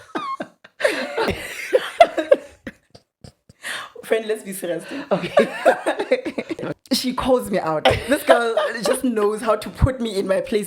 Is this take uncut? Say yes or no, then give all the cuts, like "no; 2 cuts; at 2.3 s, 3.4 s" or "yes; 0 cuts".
no; 2 cuts; at 1.3 s, 6.7 s